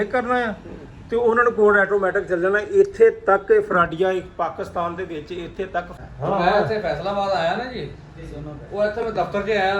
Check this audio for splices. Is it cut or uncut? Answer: cut